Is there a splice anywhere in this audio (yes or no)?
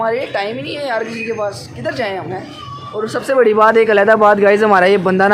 yes